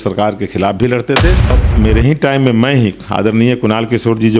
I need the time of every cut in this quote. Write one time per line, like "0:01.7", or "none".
0:01.6